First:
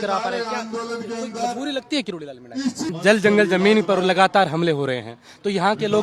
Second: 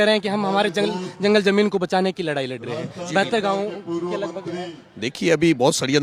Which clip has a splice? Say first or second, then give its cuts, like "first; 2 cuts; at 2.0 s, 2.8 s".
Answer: first; 1 cut; at 2.9 s